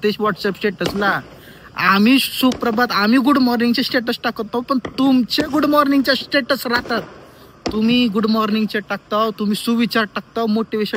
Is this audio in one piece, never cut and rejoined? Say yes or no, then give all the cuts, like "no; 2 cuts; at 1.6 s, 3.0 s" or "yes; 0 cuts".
yes; 0 cuts